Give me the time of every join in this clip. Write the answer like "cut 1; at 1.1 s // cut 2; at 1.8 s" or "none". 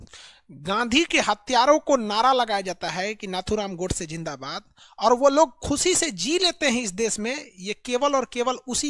none